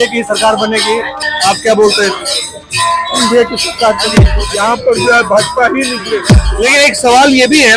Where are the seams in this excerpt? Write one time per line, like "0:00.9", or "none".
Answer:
0:01.2
0:04.3
0:06.4